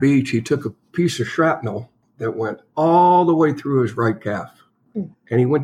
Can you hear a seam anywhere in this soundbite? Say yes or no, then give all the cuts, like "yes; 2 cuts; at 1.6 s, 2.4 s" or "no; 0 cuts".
no; 0 cuts